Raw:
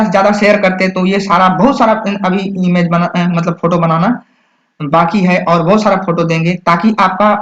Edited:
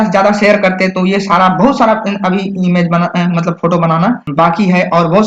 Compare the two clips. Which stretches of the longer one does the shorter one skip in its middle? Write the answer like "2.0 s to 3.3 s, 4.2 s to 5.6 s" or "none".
4.2 s to 4.8 s

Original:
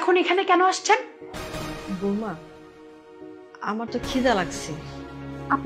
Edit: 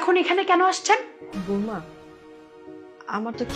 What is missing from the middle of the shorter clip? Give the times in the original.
1.2 s to 1.8 s

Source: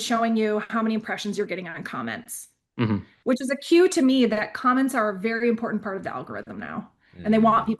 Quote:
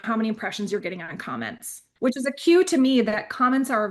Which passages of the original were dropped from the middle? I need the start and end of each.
2.5 s to 3.1 s

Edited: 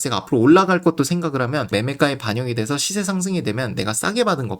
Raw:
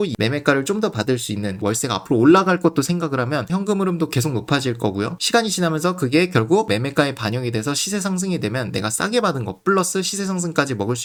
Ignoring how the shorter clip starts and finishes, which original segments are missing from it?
3.5 s to 6.7 s

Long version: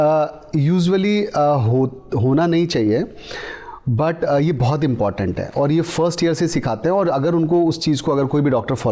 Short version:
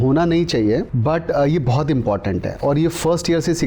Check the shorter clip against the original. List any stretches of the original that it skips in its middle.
3.1 s to 3.9 s

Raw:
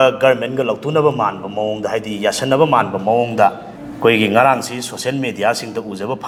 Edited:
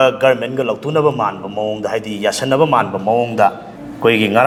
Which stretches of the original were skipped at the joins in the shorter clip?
none

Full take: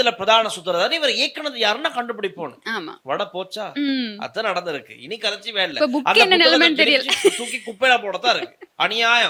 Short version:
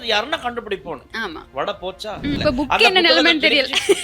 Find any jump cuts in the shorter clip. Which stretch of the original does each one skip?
3.9 s to 5.7 s

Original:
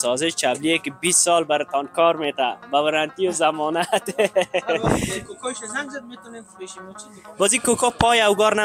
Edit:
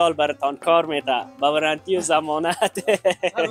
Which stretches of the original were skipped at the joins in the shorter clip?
none

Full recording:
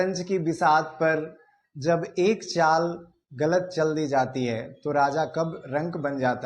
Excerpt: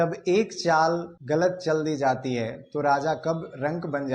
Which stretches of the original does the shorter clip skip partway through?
3.0 s to 3.2 s

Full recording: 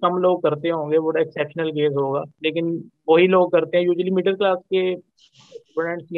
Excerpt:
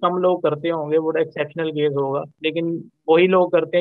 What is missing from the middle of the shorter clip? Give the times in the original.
none

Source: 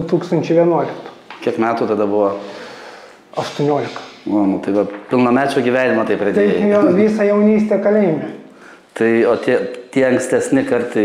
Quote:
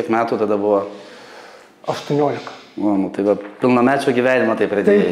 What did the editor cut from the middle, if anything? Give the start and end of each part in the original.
none

